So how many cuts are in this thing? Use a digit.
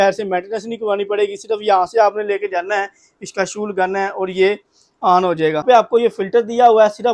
1